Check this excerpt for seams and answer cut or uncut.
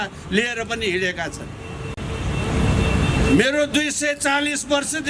uncut